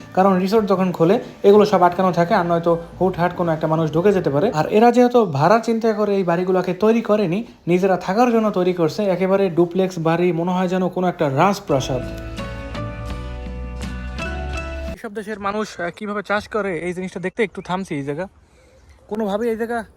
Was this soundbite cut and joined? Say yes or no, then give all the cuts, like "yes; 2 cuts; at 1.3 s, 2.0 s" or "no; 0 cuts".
yes; 2 cuts; at 4.6 s, 15.0 s